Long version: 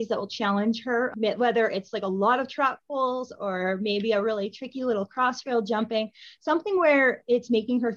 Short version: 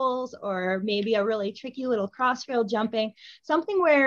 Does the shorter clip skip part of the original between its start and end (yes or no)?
no